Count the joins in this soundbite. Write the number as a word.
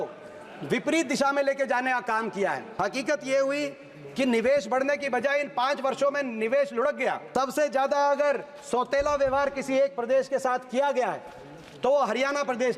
two